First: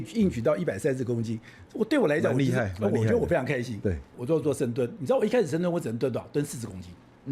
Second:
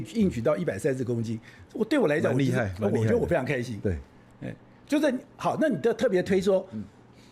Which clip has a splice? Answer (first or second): first